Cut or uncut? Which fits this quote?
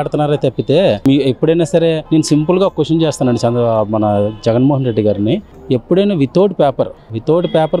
uncut